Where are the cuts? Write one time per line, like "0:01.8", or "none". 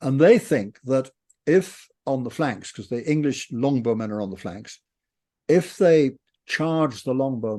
none